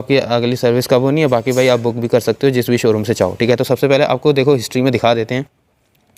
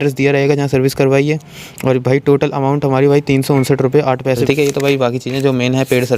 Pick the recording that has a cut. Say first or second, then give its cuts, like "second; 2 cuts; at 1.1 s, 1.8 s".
second; 1 cut; at 4.4 s